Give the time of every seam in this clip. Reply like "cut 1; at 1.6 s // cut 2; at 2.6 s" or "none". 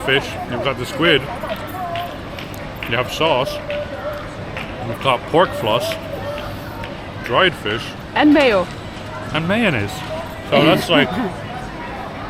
none